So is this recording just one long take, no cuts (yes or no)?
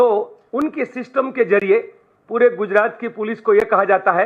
yes